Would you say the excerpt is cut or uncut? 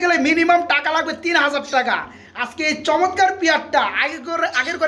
uncut